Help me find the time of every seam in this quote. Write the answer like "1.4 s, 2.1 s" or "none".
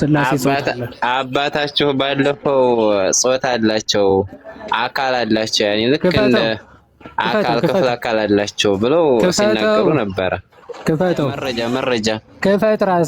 11.5 s

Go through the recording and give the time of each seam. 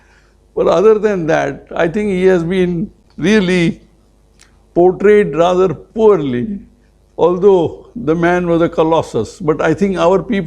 none

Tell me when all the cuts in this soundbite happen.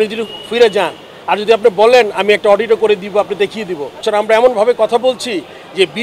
4.0 s

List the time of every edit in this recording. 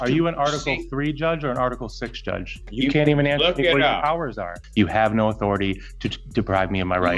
2.6 s, 4.6 s

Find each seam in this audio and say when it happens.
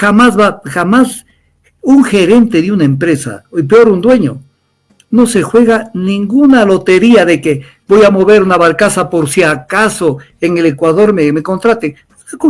none

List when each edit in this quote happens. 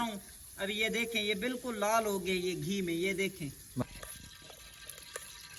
3.8 s

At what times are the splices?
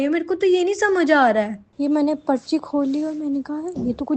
1.7 s

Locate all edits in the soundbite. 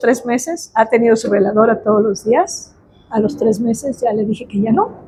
none

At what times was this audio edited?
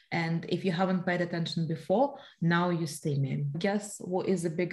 3.6 s

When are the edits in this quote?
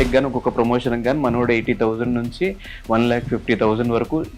none

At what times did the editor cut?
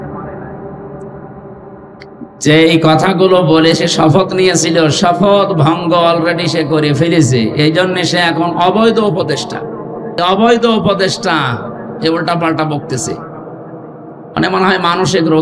10.2 s

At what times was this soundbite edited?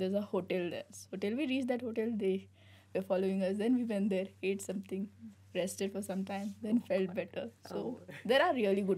none

